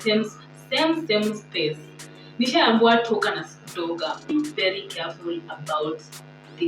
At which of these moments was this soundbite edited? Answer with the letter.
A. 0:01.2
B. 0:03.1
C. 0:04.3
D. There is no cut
C